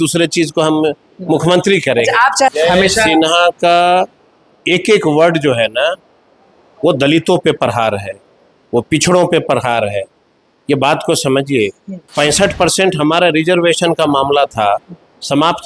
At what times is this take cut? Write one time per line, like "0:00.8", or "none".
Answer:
0:02.5
0:12.1